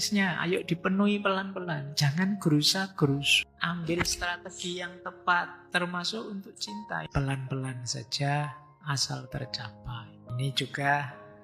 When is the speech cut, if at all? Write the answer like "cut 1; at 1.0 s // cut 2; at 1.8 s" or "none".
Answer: cut 1; at 3.3 s // cut 2; at 7.1 s // cut 3; at 10.3 s